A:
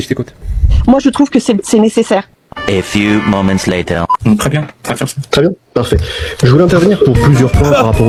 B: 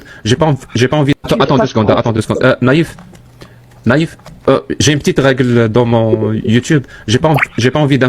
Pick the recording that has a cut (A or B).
B